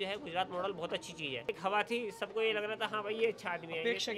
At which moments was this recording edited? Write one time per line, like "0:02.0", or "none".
0:01.5